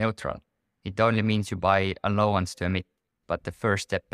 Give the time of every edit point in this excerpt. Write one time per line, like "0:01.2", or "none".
0:03.1